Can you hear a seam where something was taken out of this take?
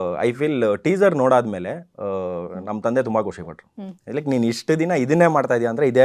no; 0 cuts

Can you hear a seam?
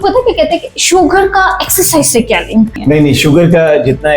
yes; 1 cut; at 2.8 s

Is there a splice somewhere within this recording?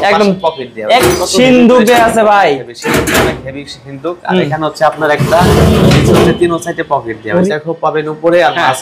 yes; 2 cuts; at 1.0 s, 7.5 s

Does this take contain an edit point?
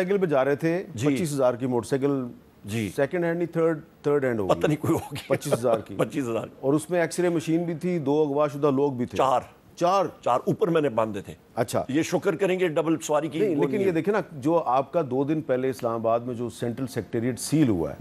no; 0 cuts

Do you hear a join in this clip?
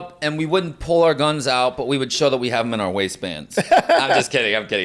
no; 0 cuts

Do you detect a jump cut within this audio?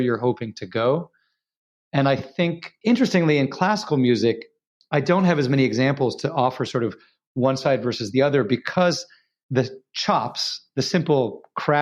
yes; 2 cuts; at 2.7 s, 9.4 s

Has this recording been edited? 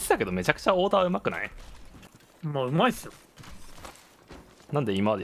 no; 0 cuts

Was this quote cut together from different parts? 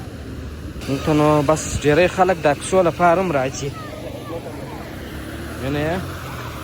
no; 0 cuts

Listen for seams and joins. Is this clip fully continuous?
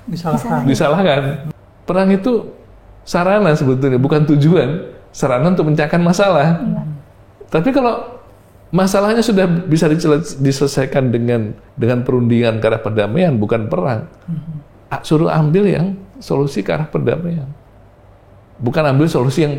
no; 2 cuts; at 1.4 s, 11.6 s

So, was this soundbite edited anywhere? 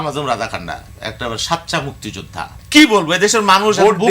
yes; 1 cut; at 2.6 s

